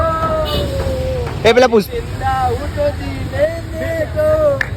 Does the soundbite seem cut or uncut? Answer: uncut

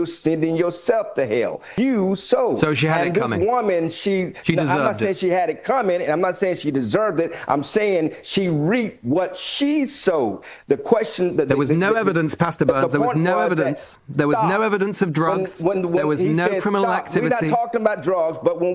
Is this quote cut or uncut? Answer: cut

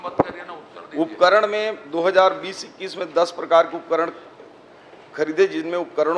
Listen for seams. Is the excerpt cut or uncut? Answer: uncut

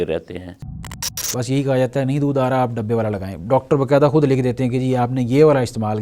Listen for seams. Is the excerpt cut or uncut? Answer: cut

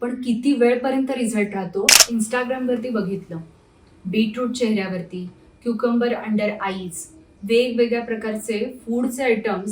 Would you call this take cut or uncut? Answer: cut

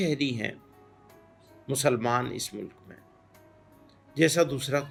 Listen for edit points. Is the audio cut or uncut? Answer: uncut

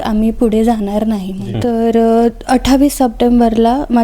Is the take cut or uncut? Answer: cut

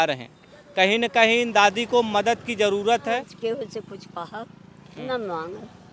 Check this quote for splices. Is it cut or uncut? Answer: cut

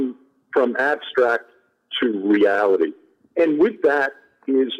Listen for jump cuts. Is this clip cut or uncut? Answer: uncut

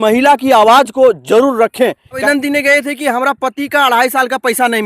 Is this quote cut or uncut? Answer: cut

